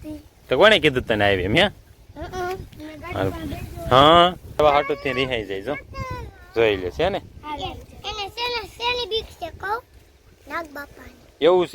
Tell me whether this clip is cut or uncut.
cut